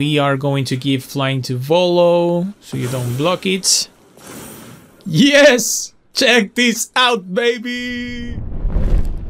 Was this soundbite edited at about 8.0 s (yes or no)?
yes